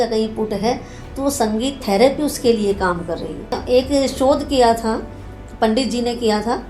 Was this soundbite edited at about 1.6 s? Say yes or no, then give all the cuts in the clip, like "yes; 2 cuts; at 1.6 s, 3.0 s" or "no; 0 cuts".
no; 1 cut; at 3.6 s